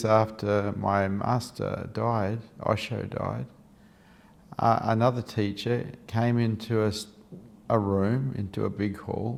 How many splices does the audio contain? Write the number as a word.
zero